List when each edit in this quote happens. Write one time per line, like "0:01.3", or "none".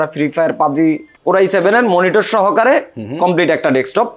0:01.1